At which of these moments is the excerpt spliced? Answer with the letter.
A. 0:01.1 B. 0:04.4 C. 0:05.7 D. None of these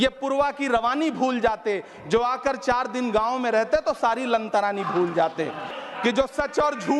C